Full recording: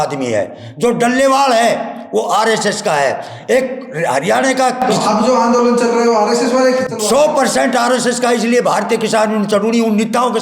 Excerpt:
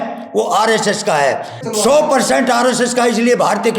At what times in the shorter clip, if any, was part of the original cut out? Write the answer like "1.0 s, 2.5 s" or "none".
1.6 s